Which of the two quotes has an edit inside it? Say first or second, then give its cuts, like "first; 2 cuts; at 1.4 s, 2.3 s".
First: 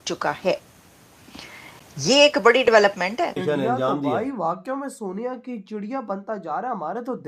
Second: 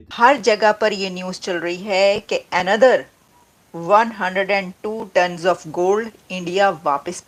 first; 1 cut; at 3.4 s